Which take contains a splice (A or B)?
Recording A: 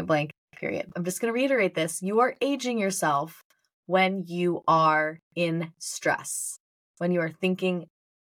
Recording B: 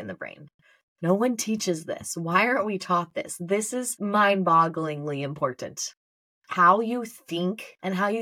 A